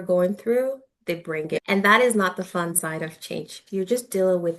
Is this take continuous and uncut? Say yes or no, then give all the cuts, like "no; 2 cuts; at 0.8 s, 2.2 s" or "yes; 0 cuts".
no; 1 cut; at 3.5 s